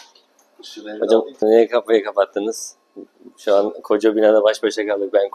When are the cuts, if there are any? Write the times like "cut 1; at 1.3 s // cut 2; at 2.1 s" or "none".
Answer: cut 1; at 1.4 s